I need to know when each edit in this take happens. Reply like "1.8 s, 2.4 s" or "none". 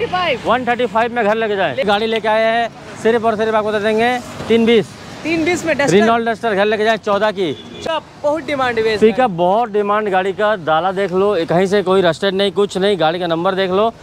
1.9 s, 7.8 s